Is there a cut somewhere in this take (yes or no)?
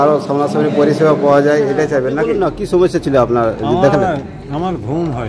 yes